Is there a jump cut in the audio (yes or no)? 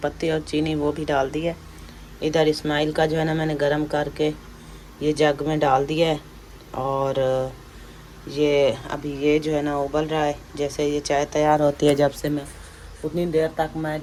no